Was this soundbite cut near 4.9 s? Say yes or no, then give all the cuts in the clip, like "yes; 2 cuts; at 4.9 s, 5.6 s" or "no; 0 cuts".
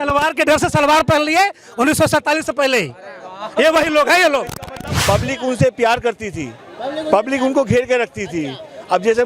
yes; 1 cut; at 4.9 s